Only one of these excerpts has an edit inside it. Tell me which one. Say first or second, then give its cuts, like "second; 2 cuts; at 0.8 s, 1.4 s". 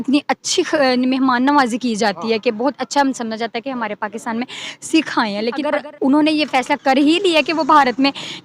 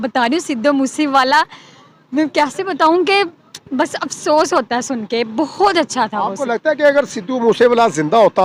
first; 1 cut; at 5.7 s